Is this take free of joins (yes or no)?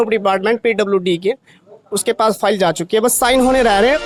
yes